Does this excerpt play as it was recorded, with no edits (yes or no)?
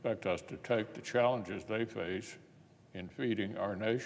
no